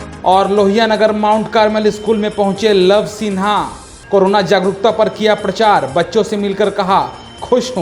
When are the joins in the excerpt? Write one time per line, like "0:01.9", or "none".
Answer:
none